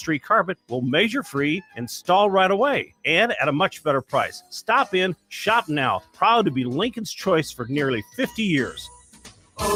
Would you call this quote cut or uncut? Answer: uncut